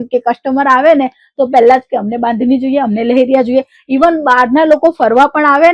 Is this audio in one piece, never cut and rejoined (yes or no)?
yes